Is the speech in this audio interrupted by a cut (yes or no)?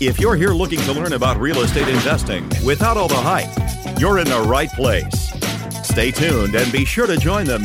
no